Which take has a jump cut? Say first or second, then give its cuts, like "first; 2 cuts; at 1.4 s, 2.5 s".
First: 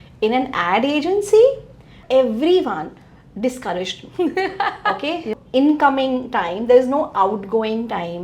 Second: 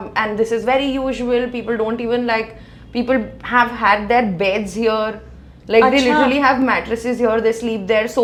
first; 2 cuts; at 2.0 s, 5.4 s